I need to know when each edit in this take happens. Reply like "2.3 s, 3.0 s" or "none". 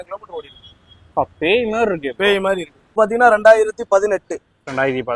3.0 s